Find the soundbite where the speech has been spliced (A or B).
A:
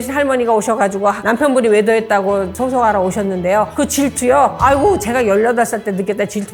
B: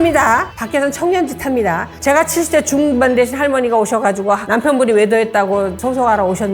B